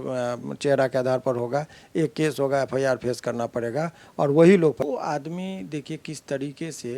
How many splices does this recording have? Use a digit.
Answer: 1